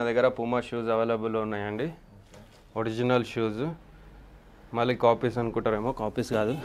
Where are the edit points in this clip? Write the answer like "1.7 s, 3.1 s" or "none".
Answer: none

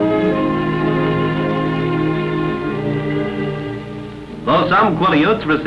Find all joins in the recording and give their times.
none

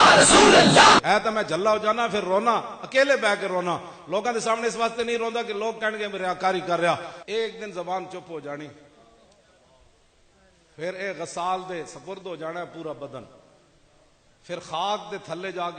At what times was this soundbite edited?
1.0 s, 7.1 s

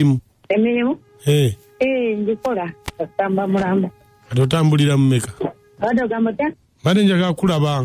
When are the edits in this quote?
5.7 s

